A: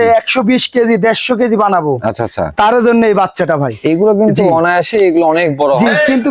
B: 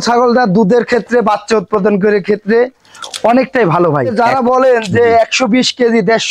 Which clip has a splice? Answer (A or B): B